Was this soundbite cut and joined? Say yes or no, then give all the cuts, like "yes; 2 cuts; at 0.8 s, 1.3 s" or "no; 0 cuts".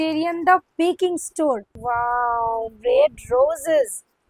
yes; 1 cut; at 1.8 s